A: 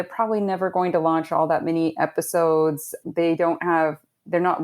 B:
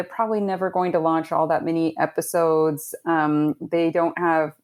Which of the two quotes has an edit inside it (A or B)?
A